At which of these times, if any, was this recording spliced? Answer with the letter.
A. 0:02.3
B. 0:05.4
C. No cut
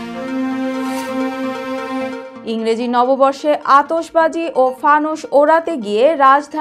A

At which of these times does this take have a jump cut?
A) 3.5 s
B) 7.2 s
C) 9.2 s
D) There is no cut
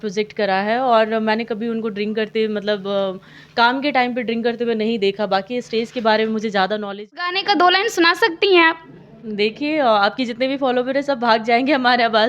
B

